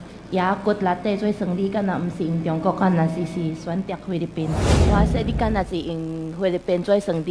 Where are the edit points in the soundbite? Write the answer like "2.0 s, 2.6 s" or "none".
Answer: 4.8 s